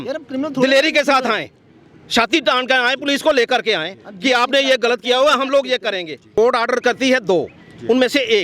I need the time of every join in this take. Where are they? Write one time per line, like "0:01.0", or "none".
0:06.4